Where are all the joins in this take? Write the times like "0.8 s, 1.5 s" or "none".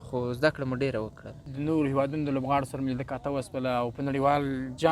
1.4 s